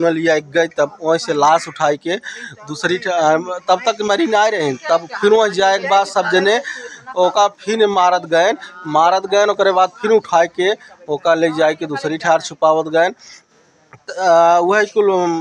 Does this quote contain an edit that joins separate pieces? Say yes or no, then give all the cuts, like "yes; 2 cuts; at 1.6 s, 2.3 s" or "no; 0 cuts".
no; 0 cuts